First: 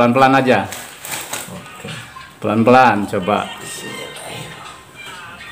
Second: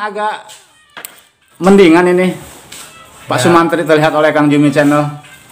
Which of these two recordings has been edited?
second; 1 cut; at 1.6 s

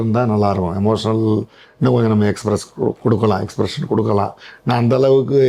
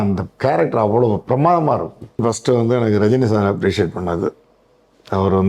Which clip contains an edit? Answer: second; 1 cut; at 2.2 s

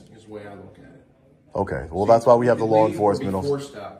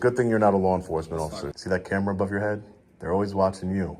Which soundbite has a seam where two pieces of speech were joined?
second; 1 cut; at 1.5 s

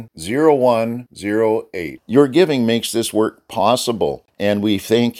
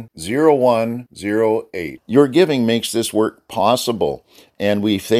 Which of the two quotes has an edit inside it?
first; 1 cut; at 4.3 s

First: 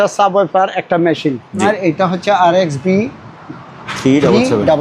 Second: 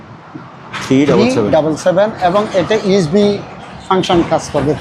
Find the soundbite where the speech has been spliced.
first; 1 cut; at 1.6 s

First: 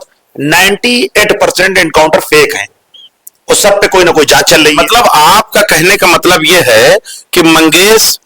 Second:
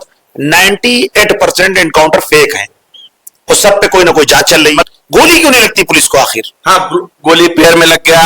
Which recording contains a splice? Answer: second; 1 cut; at 4.9 s

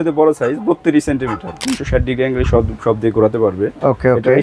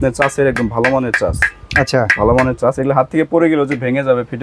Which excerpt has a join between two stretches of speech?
first; 1 cut; at 1.6 s

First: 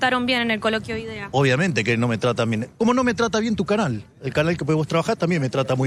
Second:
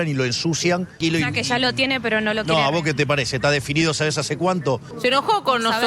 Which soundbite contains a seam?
second; 2 cuts; at 1.0 s, 4.9 s

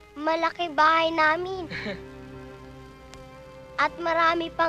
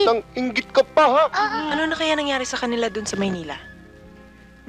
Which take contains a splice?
second; 1 cut; at 1.7 s

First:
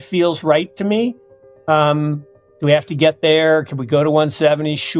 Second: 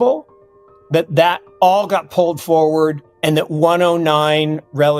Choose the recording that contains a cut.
second; 1 cut; at 3.1 s

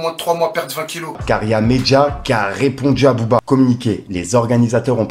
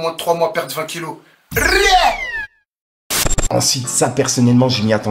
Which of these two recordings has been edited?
first; 2 cuts; at 1.2 s, 4.0 s

